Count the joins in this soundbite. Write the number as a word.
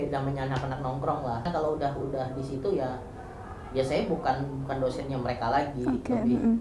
one